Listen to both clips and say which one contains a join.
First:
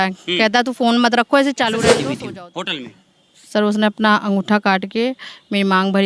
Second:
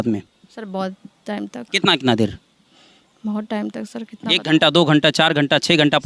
first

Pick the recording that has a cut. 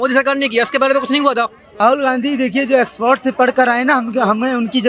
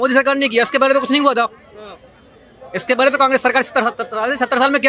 first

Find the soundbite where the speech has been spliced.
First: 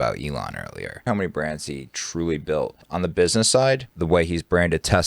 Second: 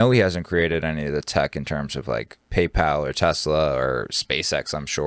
first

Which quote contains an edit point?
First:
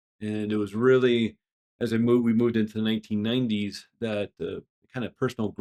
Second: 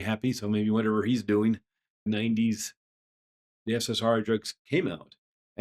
second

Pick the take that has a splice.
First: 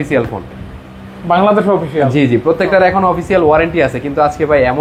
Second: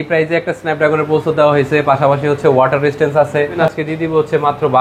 second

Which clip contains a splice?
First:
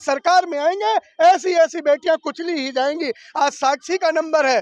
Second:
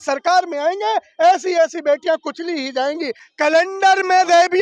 second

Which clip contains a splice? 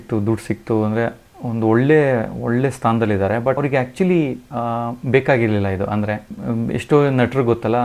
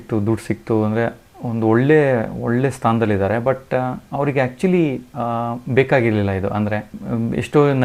first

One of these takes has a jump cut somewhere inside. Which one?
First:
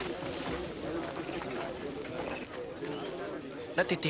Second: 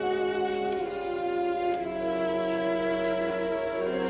first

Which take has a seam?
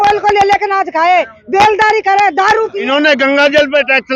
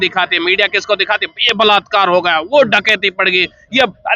first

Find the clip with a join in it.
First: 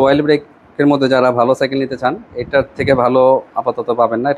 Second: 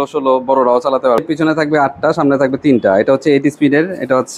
second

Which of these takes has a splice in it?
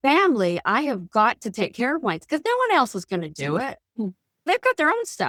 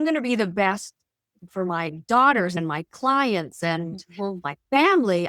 second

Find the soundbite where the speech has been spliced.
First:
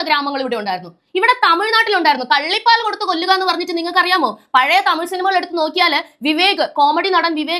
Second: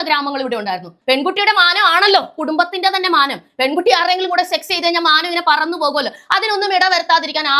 second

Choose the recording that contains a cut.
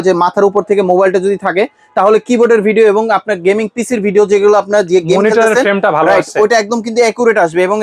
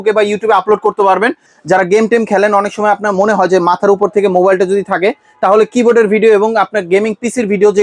second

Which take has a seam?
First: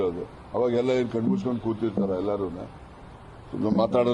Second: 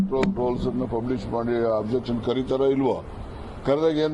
first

